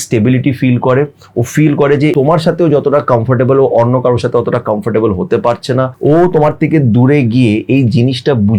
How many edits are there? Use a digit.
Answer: 2